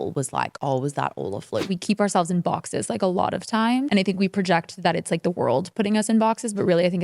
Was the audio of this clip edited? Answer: yes; 2 cuts; at 1.7 s, 3.9 s

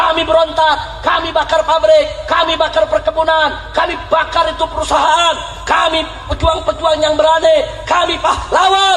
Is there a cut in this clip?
no; 0 cuts

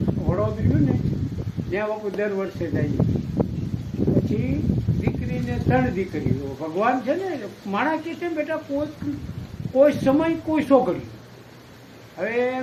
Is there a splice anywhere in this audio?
no; 0 cuts

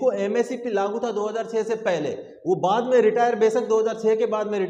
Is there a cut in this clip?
no; 0 cuts

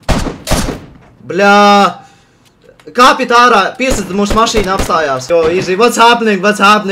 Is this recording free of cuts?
no; 1 cut; at 5.2 s

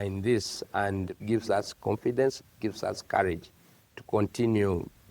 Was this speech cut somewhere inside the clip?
yes; 1 cut; at 1.1 s

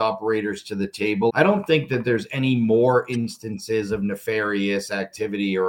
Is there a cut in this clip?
yes; 1 cut; at 1.3 s

